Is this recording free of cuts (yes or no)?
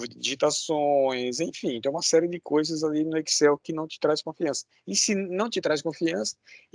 yes